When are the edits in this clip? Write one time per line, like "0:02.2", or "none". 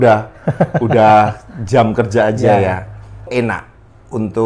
0:03.3